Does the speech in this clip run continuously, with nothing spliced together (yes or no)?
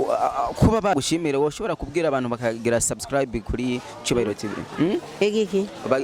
no